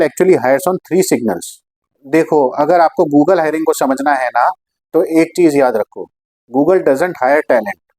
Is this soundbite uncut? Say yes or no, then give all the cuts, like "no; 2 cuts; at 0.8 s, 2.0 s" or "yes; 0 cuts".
yes; 0 cuts